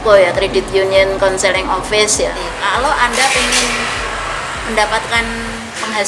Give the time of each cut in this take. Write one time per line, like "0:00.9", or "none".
0:02.4

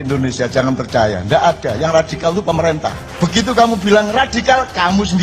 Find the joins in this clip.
0:03.1

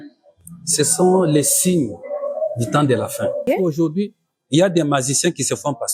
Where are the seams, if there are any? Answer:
0:03.5

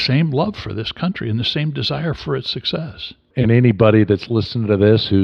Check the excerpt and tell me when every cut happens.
0:03.3

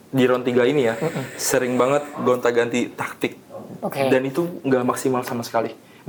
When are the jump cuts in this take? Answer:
none

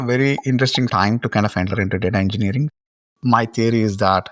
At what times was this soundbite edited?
0:00.9
0:03.0

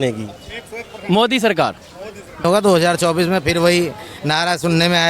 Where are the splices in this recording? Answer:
0:02.4

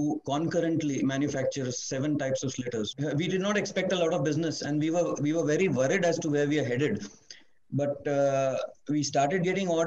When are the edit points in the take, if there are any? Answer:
0:02.9

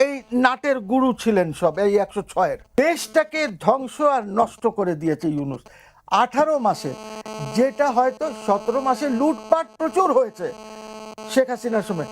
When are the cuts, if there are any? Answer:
0:02.6

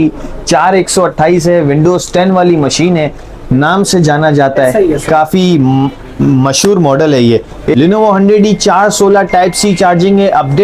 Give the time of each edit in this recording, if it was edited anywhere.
0:07.7

